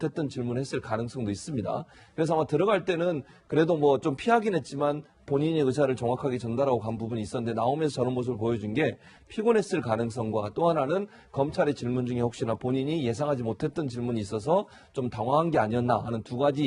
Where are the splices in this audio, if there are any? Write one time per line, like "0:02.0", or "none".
0:14.2